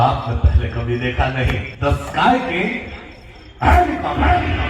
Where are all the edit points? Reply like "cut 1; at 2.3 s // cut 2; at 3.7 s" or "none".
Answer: cut 1; at 1.7 s

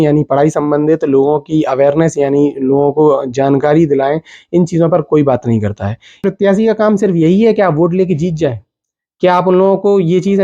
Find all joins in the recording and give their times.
cut 1; at 6.2 s

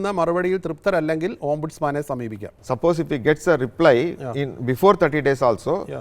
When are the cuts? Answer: cut 1; at 2.6 s

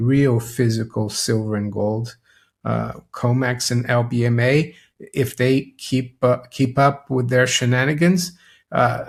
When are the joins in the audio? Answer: none

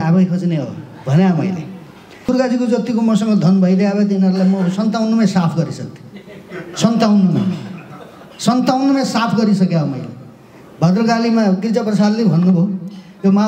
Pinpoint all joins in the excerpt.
cut 1; at 2.3 s

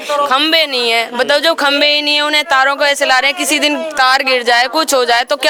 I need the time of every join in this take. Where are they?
none

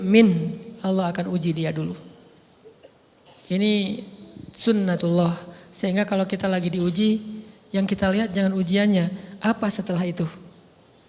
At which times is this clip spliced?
cut 1; at 2.8 s

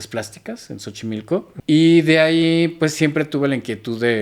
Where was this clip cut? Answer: cut 1; at 1.5 s

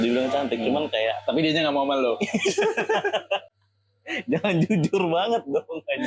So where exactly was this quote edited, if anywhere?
none

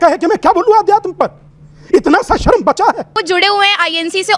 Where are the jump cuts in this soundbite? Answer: cut 1; at 3.1 s

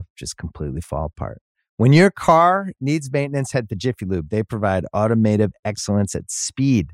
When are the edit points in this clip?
none

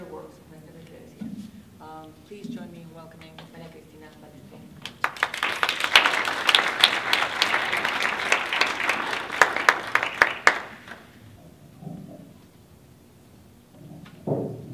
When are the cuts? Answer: cut 1; at 11.3 s

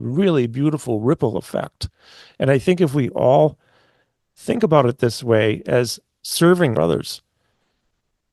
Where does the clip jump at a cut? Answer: cut 1; at 6.8 s

